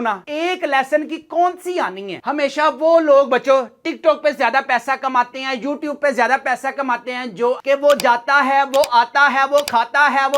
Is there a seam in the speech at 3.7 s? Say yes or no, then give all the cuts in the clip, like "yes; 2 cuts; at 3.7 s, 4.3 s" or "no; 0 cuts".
no; 2 cuts; at 2.2 s, 7.6 s